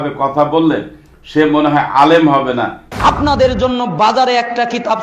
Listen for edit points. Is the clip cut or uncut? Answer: cut